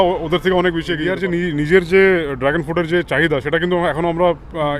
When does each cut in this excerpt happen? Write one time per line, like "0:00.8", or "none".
0:01.1